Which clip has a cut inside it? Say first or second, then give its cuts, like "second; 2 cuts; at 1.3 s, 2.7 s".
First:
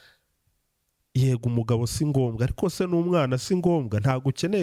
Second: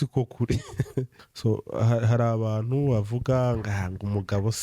second; 1 cut; at 1.2 s